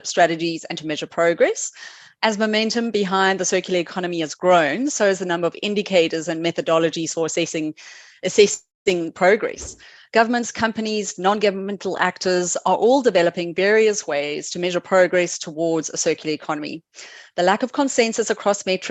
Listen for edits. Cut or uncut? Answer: uncut